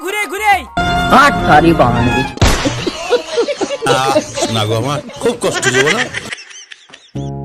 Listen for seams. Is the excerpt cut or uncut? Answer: uncut